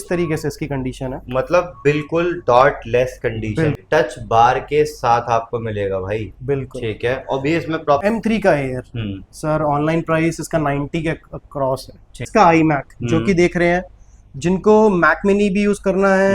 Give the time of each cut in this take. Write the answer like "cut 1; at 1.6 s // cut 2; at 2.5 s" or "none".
cut 1; at 3.8 s // cut 2; at 8.0 s // cut 3; at 12.3 s